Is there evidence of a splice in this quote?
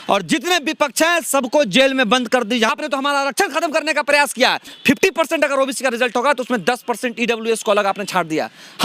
yes; 2 cuts; at 2.7 s, 4.7 s

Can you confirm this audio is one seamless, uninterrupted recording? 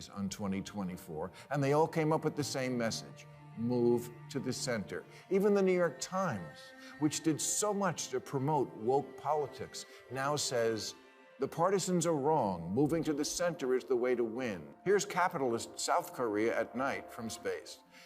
no; 1 cut; at 14.7 s

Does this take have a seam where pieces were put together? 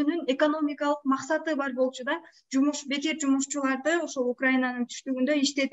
no; 0 cuts

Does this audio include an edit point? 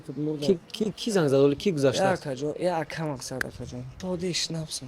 yes; 1 cut; at 4.0 s

